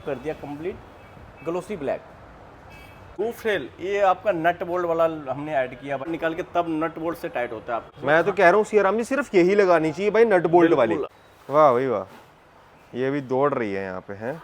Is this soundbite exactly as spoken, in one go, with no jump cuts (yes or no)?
no